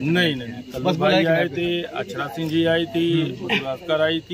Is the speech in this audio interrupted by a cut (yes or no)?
no